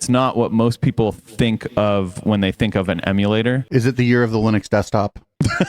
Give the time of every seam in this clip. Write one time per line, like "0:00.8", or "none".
0:03.6